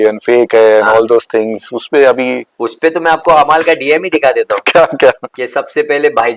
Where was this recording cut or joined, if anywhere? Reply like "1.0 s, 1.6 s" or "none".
none